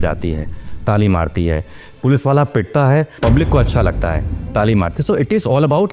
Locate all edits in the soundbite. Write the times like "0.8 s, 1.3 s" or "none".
3.1 s